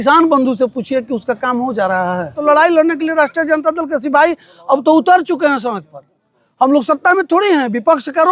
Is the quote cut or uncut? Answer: cut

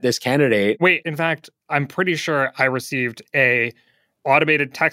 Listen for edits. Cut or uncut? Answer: cut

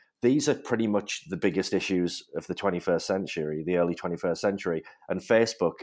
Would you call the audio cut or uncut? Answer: uncut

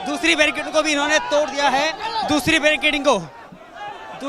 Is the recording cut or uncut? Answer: uncut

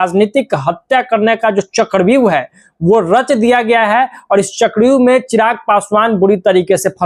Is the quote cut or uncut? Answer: uncut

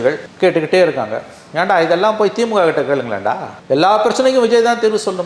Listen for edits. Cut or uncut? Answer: uncut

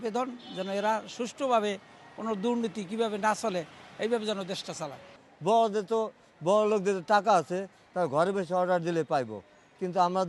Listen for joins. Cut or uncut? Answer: cut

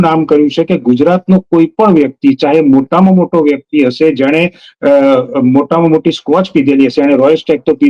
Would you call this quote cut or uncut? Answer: uncut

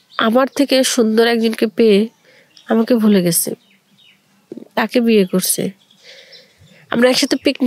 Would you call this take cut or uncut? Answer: uncut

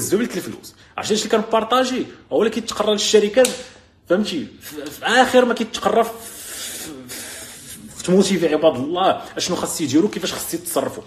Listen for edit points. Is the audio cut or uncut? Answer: uncut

